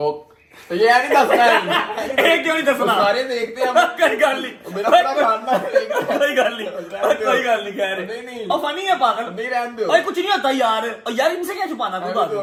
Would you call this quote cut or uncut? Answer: uncut